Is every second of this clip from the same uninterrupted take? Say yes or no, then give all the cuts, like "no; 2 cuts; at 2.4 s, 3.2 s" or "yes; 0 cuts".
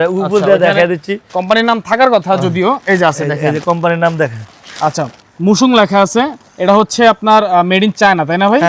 yes; 0 cuts